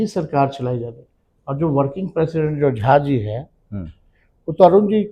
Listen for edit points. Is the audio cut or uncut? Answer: uncut